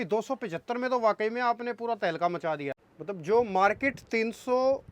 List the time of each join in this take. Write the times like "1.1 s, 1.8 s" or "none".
2.8 s